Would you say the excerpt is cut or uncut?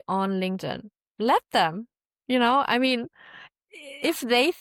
uncut